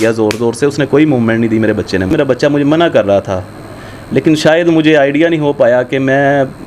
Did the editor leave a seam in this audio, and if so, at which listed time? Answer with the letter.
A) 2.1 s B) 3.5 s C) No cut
A